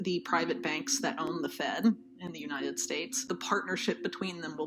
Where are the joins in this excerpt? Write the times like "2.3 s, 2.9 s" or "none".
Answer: 3.2 s